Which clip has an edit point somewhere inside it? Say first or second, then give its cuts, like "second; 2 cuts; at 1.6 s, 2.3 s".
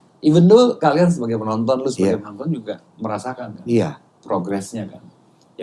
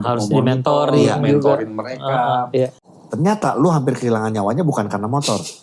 second; 1 cut; at 2.9 s